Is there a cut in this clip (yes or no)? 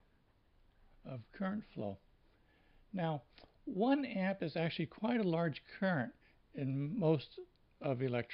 yes